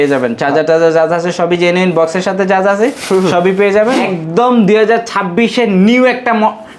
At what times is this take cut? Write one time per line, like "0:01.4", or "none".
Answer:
0:04.0